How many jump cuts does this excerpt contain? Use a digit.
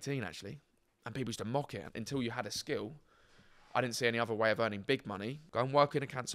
2